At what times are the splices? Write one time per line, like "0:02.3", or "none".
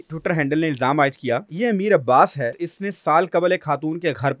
0:01.5
0:02.6